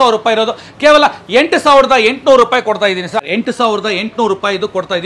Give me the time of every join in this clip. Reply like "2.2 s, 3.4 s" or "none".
3.3 s

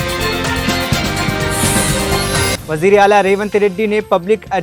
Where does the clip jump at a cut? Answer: 2.6 s

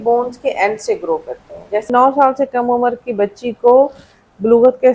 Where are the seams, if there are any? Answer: 1.9 s

